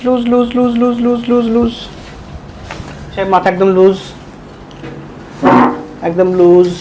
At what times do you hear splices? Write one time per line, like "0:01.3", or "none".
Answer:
0:03.0